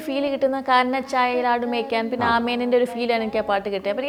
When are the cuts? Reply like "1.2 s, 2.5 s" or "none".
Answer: none

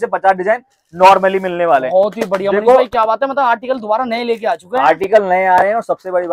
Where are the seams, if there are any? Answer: none

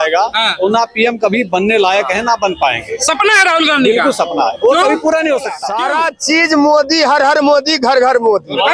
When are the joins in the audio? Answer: 5.6 s

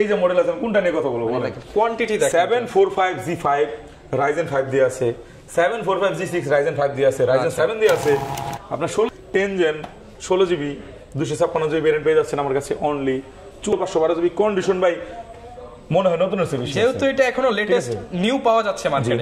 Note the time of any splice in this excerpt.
9.2 s, 13.7 s

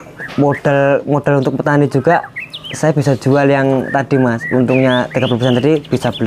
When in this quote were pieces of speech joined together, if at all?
none

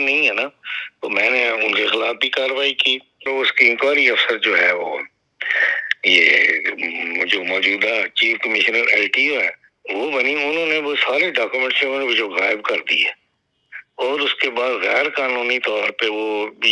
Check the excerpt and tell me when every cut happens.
3.3 s

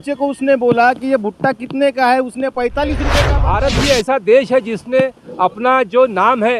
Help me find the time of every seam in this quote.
3.3 s

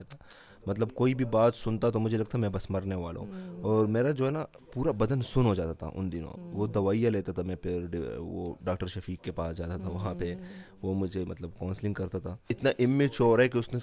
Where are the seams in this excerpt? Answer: 12.5 s

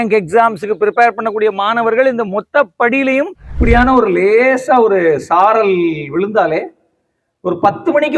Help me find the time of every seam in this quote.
3.4 s

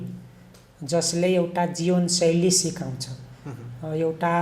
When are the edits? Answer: none

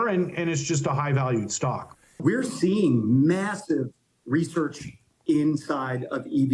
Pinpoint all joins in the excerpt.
2.2 s

